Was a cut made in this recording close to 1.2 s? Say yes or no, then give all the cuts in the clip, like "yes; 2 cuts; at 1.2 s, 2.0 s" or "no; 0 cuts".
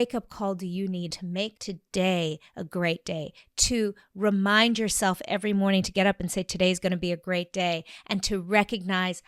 yes; 1 cut; at 1.2 s